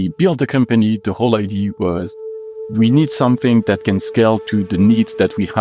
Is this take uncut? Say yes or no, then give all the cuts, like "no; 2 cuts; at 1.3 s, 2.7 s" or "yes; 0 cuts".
yes; 0 cuts